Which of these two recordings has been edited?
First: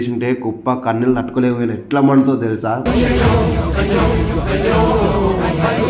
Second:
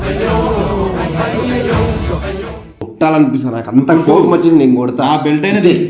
second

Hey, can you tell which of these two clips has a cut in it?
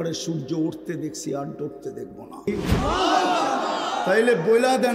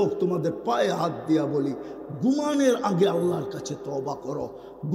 first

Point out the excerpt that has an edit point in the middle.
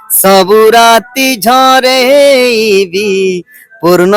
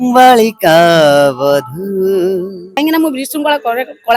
second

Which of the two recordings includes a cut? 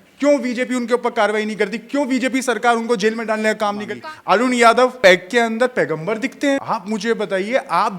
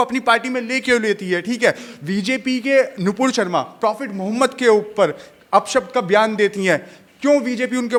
first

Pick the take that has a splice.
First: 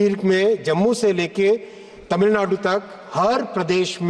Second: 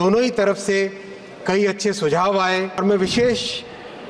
second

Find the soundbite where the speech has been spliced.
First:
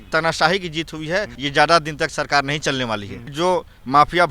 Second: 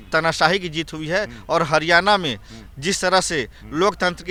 first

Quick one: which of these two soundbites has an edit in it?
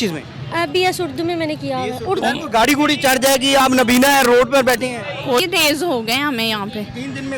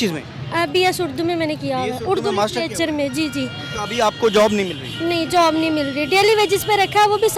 first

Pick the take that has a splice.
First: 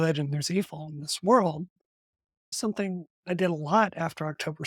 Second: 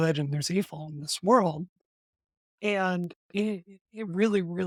first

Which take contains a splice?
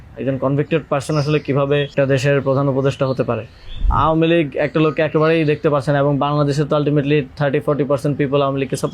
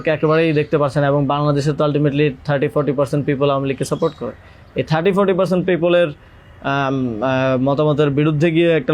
first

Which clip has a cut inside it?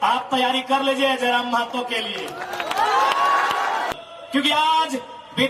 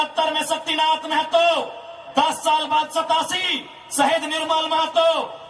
first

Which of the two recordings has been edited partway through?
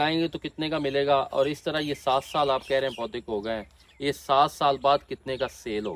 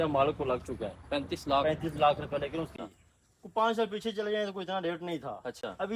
second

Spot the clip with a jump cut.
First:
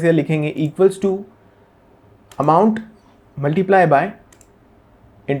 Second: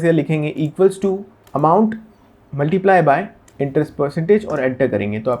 second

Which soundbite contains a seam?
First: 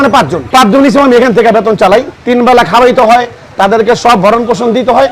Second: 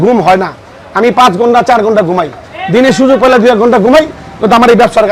first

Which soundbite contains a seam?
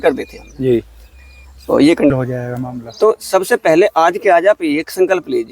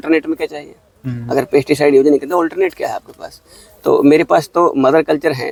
first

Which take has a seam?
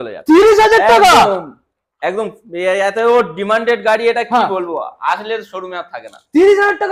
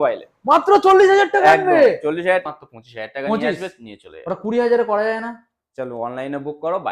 second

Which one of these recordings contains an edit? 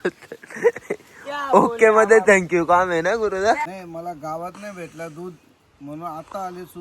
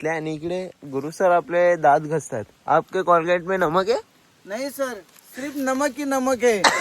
first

